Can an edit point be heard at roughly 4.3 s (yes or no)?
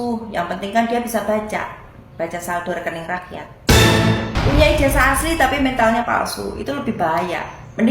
yes